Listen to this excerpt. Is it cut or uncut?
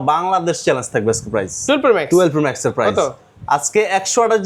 uncut